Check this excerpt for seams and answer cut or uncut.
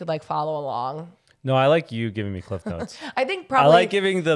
uncut